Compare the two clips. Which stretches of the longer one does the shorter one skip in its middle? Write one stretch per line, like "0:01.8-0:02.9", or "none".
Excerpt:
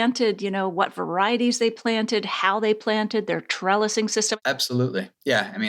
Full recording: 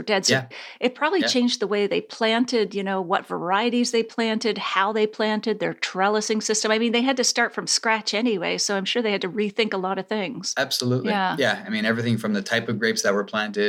0:06.7-0:10.4